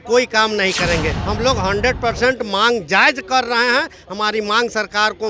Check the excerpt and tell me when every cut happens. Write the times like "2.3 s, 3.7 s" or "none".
1.2 s

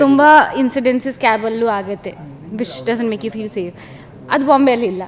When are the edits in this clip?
none

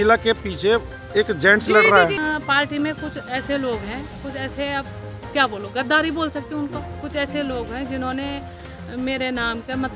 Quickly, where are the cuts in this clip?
2.2 s

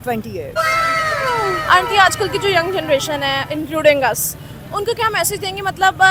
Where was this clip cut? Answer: none

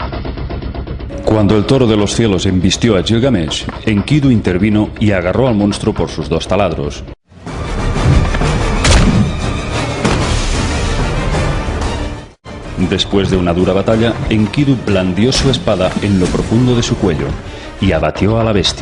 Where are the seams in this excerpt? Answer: none

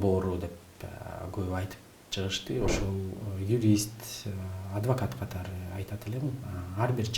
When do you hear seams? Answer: 2.7 s

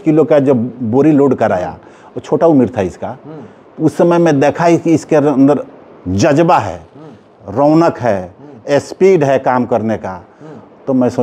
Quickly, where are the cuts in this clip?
none

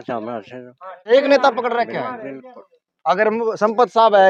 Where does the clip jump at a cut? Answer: none

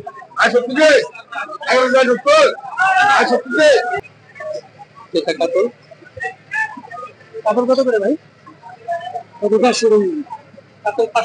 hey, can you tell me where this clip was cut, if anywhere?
4.0 s

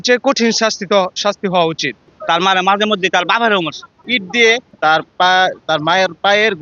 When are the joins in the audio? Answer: 1.9 s, 4.0 s

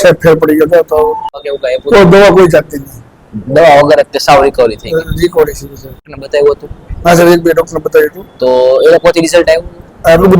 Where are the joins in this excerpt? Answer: 1.4 s, 6.1 s

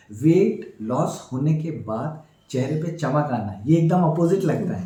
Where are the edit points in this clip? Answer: none

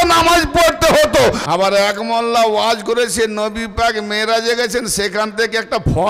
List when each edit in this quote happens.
1.4 s

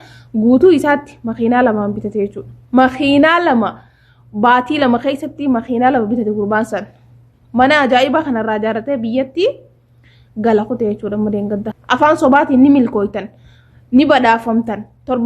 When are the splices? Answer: 11.7 s

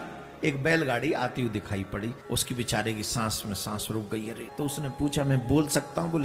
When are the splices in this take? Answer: 2.2 s, 4.4 s

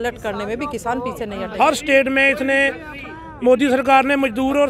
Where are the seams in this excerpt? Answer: 1.4 s

